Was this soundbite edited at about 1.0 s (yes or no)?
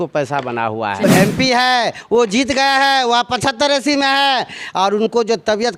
yes